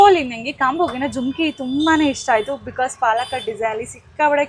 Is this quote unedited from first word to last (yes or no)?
yes